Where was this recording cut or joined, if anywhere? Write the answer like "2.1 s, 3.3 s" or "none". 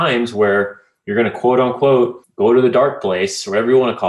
2.2 s